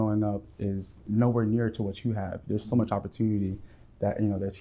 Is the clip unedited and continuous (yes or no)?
yes